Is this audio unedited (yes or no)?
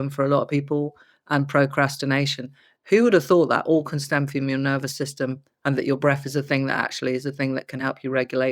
yes